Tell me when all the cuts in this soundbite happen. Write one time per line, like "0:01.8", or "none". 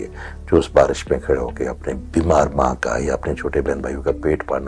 0:02.0